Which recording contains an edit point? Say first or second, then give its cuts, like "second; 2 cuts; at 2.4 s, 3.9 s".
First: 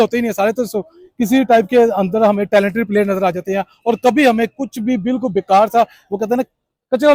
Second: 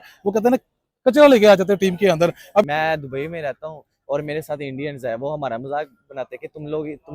second; 1 cut; at 2.6 s